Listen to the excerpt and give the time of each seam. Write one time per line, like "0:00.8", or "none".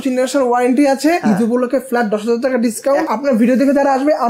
0:01.2
0:03.1